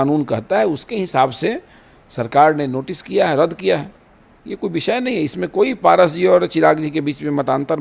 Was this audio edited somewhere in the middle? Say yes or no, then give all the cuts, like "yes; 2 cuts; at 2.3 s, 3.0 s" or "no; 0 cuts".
no; 0 cuts